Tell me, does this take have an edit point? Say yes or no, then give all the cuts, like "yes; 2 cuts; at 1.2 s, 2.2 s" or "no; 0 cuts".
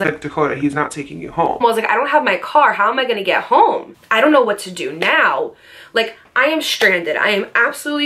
yes; 2 cuts; at 1.6 s, 4.0 s